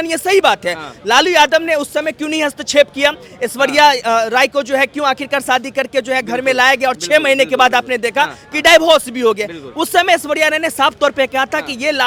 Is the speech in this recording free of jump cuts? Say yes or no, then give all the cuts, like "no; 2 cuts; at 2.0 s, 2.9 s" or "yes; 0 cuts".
yes; 0 cuts